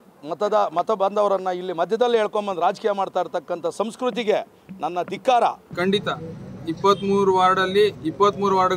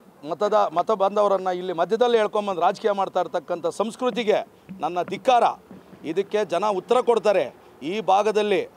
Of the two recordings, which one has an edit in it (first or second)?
first